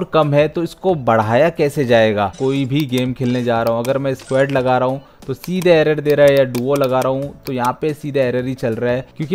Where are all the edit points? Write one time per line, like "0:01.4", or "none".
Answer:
0:02.4